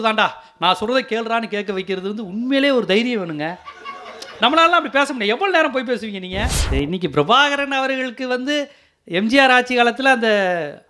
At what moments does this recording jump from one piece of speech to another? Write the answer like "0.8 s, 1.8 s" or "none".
6.5 s